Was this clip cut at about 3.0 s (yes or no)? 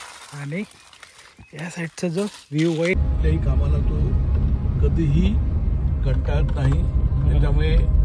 yes